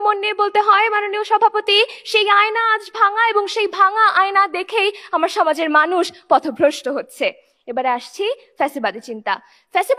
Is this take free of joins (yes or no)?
yes